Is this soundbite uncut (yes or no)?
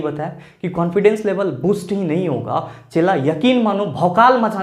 yes